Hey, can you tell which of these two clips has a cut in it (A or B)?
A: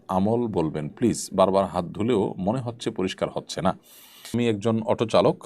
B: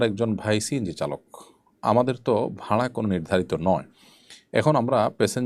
A